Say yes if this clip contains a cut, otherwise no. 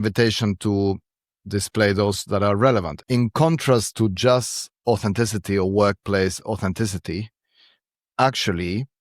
yes